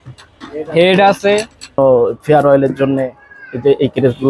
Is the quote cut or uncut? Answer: cut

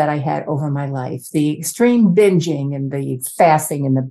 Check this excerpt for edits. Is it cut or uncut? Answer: uncut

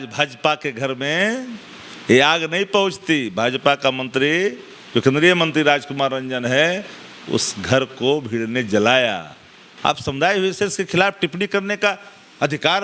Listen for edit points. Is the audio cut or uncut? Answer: uncut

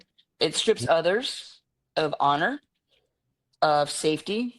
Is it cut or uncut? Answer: uncut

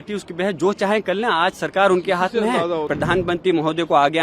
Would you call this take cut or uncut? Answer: cut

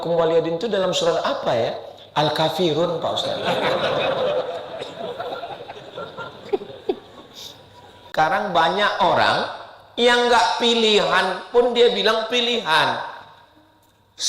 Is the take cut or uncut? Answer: cut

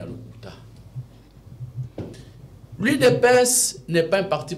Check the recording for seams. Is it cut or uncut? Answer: uncut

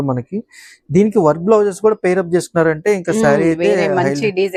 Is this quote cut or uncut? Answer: uncut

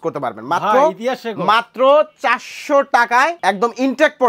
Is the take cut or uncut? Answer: cut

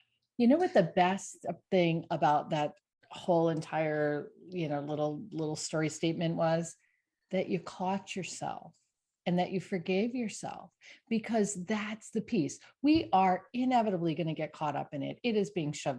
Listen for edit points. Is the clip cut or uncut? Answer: uncut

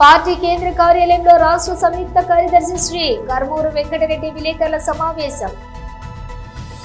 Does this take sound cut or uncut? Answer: uncut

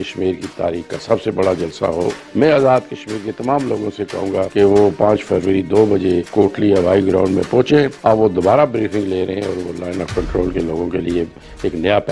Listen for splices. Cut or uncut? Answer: cut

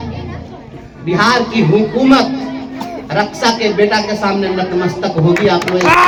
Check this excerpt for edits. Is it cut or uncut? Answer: uncut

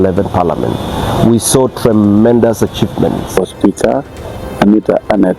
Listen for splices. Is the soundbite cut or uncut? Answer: cut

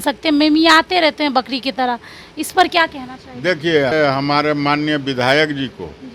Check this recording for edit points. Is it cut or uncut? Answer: cut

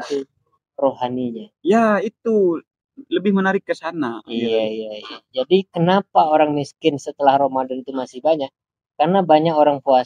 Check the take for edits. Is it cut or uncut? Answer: uncut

